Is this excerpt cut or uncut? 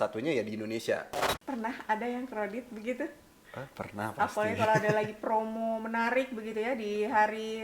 cut